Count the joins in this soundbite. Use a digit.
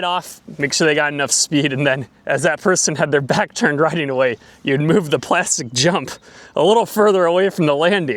0